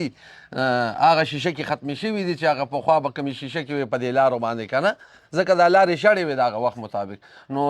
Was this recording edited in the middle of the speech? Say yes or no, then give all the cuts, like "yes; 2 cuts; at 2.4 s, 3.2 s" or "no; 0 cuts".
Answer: no; 0 cuts